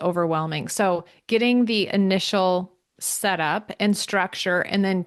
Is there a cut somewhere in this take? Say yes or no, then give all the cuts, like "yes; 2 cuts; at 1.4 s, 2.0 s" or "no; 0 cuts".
no; 0 cuts